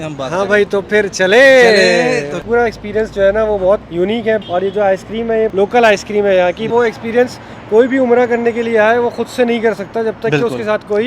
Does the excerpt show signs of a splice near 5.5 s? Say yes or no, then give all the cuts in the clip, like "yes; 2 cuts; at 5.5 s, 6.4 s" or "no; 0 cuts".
yes; 4 cuts; at 2.4 s, 4.2 s, 5.5 s, 6.7 s